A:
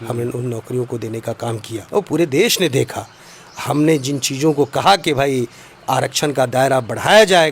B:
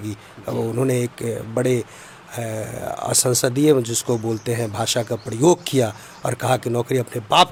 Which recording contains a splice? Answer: A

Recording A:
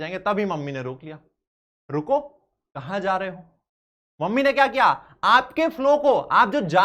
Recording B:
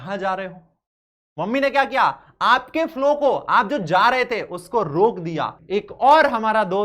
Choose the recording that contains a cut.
B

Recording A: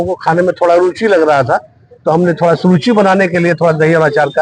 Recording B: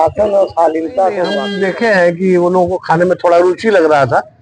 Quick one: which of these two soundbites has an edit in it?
B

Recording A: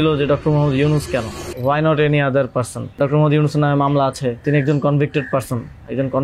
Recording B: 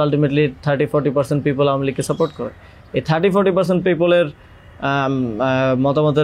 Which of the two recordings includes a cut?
A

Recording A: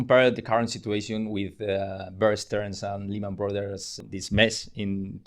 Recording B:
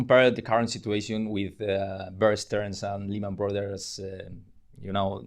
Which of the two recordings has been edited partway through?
A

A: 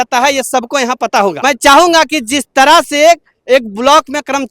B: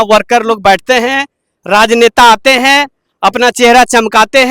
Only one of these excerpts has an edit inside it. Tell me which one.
A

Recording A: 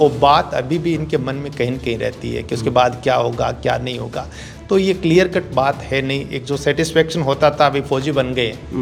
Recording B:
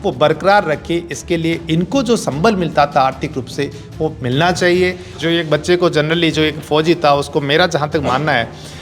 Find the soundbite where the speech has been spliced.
B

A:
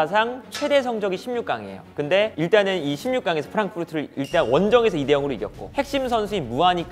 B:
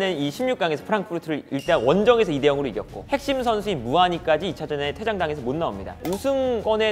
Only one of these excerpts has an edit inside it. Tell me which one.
B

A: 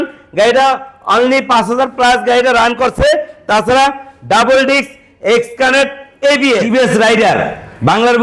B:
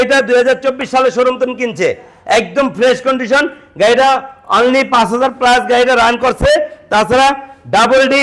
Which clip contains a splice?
A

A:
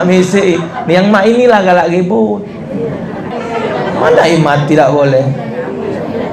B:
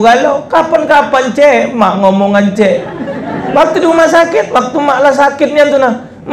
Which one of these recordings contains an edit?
A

